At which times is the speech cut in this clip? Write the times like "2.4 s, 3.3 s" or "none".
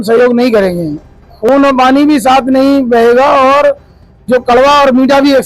1.5 s

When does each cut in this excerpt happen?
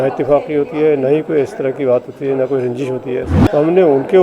3.3 s

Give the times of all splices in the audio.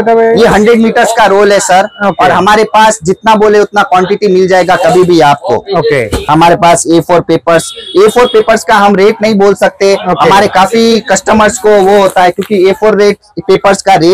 none

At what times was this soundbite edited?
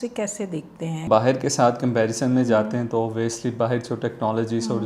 1.1 s

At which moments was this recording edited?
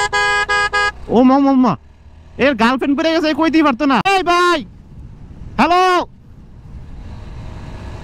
4.1 s

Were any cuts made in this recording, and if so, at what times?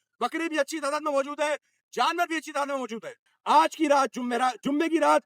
3.3 s

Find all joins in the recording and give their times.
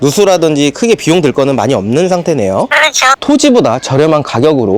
3.1 s

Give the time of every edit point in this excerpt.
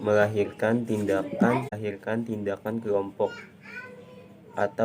1.7 s

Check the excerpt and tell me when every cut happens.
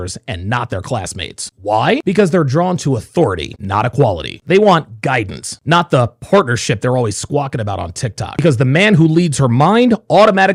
none

